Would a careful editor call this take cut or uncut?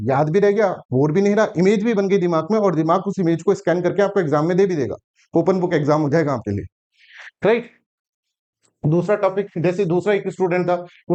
uncut